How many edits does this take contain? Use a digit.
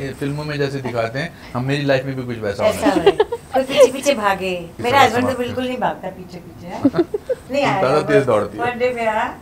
2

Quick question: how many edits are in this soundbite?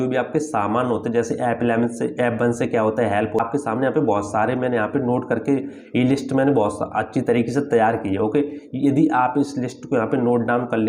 1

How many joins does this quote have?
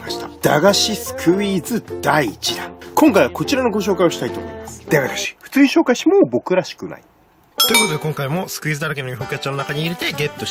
1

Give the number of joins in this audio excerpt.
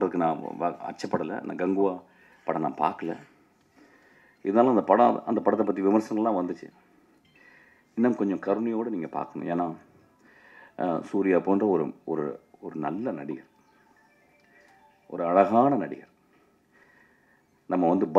0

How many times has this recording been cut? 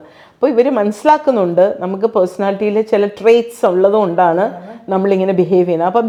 0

